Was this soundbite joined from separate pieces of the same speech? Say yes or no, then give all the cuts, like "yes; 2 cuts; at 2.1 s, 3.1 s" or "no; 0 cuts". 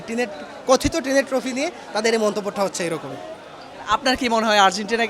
no; 0 cuts